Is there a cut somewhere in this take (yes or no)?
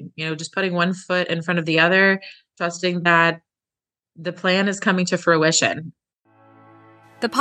yes